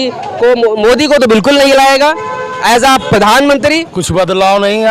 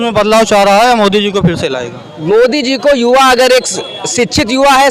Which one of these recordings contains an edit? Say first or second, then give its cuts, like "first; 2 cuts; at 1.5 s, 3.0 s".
first; 1 cut; at 3.9 s